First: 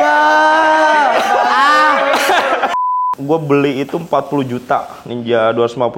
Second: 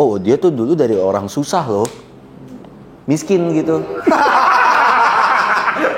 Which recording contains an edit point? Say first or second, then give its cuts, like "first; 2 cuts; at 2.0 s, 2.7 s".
first; 1 cut; at 3.0 s